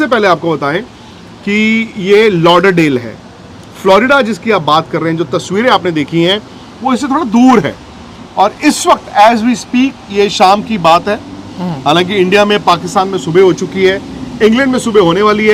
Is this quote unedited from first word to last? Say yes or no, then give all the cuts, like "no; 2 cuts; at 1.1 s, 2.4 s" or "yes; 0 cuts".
yes; 0 cuts